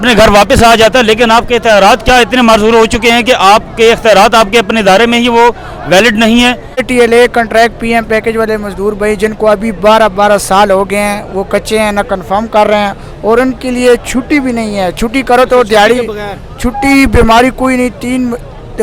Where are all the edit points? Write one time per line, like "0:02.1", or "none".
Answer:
0:06.9